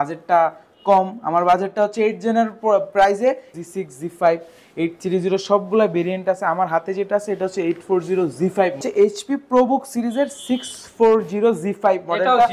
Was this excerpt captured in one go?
no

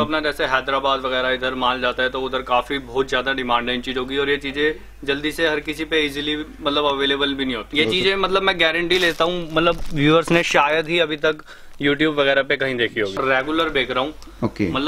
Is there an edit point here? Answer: yes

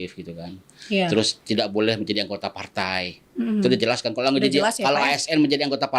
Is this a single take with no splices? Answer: yes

